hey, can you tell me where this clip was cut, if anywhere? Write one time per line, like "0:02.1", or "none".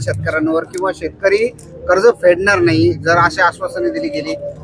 none